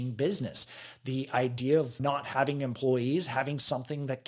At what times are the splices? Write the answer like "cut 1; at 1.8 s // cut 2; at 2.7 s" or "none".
cut 1; at 2.0 s